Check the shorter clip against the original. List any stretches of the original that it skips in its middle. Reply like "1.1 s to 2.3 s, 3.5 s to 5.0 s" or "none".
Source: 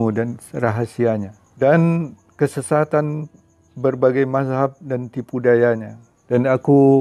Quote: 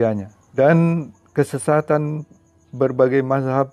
none